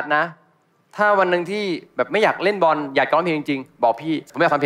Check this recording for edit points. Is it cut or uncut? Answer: uncut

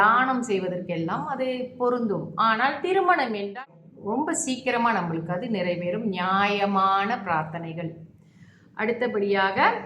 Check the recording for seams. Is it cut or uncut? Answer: cut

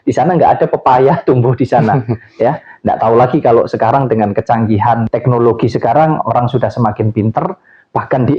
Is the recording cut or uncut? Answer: cut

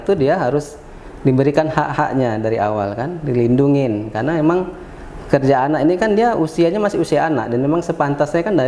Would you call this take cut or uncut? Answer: uncut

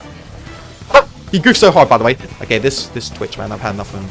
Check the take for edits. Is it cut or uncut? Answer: cut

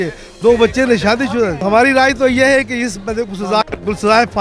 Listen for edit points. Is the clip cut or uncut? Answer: cut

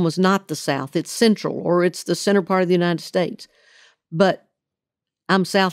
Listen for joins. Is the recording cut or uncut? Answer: uncut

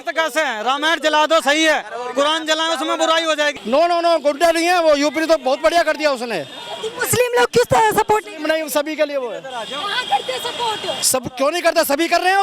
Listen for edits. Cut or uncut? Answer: cut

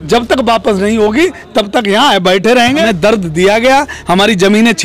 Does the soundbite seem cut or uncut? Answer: cut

